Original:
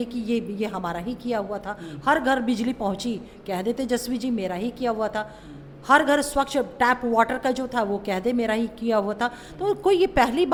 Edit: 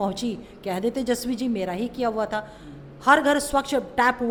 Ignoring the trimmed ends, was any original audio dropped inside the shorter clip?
no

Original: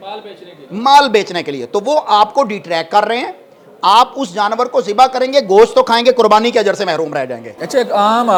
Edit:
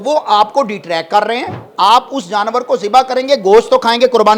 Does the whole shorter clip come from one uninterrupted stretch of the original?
no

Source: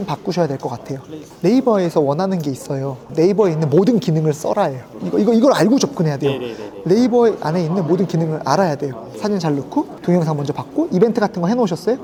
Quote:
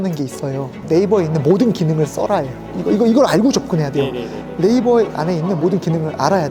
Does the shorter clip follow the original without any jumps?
yes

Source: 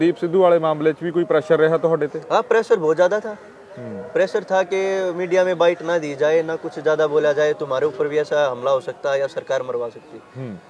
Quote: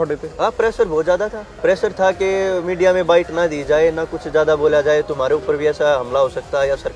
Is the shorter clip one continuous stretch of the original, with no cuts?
no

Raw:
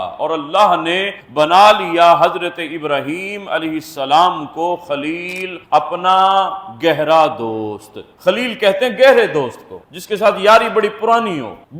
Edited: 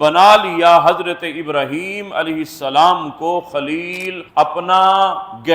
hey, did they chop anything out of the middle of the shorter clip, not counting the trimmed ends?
no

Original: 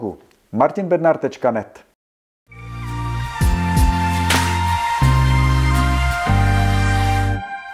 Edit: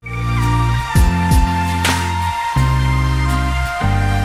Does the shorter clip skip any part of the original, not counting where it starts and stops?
no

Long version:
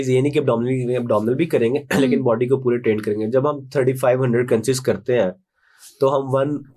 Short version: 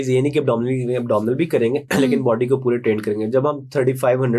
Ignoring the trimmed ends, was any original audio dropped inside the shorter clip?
no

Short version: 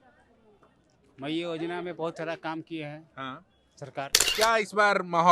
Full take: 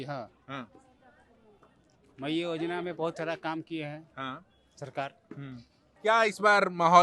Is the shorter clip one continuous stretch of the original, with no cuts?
no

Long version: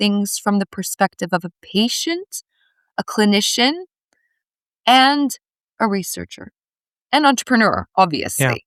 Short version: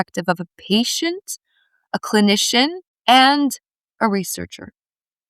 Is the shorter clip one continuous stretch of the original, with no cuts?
no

